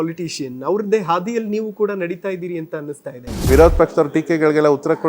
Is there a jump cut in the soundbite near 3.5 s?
yes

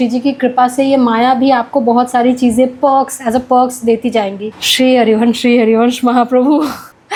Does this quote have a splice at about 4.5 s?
no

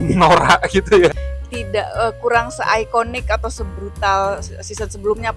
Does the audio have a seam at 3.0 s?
no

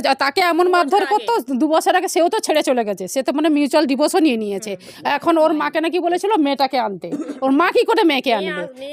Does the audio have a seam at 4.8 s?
no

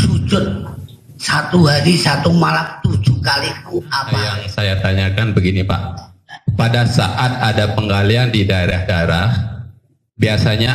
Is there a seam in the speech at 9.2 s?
no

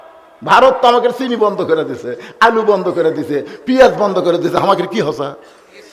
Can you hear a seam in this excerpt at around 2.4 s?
no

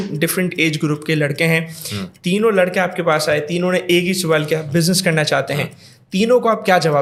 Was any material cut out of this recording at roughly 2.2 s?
no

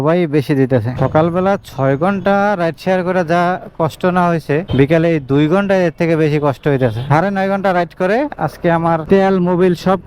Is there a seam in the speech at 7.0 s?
yes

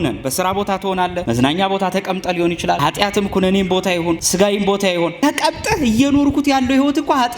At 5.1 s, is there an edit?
yes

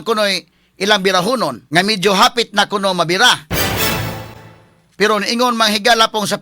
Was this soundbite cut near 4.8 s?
no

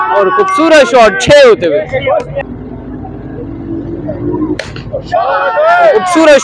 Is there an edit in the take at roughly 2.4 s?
yes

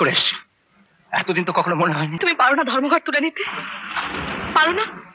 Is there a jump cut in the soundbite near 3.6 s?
no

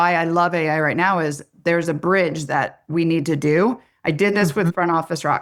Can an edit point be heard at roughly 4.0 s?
no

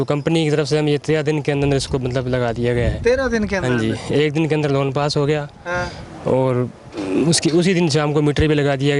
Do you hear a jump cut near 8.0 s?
no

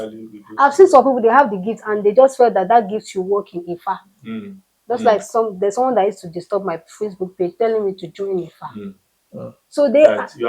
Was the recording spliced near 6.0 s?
no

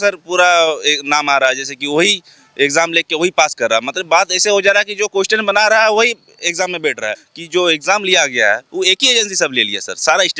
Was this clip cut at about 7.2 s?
yes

